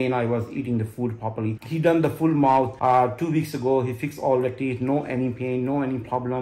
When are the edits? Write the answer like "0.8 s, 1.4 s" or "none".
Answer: none